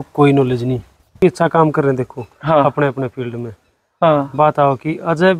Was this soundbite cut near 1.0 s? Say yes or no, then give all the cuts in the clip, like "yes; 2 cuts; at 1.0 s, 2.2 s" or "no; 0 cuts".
yes; 1 cut; at 1.0 s